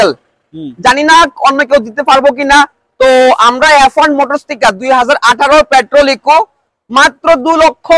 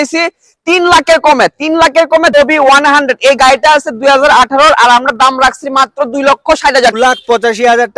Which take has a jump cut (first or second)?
second